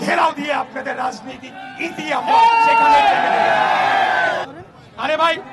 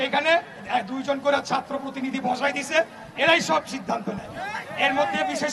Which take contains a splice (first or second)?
first